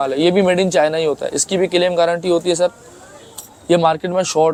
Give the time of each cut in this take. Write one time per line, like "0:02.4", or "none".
none